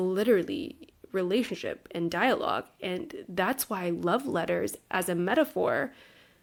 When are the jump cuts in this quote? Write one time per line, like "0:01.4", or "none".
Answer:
none